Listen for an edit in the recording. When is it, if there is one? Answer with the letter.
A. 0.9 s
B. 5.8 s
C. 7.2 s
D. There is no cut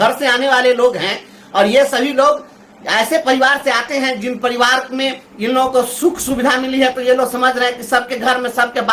D